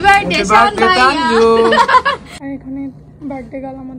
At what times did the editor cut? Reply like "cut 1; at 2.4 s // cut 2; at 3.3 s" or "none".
cut 1; at 2.4 s